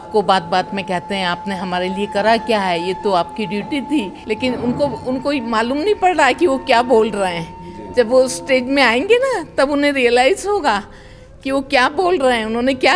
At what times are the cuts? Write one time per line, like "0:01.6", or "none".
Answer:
none